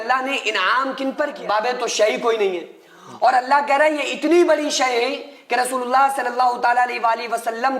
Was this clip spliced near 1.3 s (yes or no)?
yes